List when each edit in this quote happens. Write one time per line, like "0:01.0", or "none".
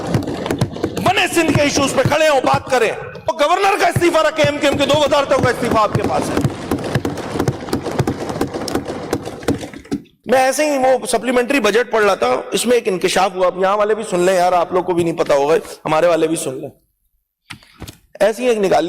none